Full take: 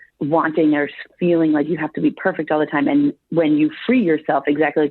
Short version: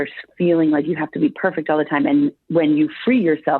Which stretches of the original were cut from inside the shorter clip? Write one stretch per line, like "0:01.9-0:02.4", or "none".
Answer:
none